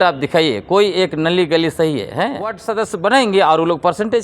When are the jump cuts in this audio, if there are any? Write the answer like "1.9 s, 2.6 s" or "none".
2.6 s